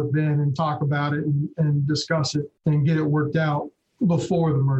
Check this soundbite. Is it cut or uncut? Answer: cut